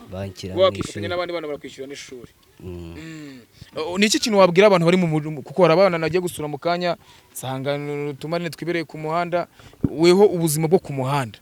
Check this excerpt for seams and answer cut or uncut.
uncut